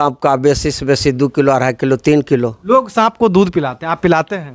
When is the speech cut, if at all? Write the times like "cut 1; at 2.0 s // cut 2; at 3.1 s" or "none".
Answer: cut 1; at 2.6 s